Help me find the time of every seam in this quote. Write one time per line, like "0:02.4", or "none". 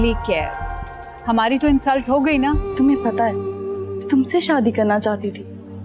0:02.6